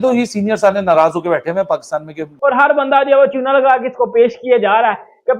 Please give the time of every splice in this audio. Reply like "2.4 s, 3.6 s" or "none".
2.3 s